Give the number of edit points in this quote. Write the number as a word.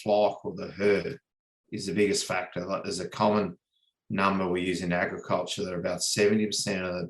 zero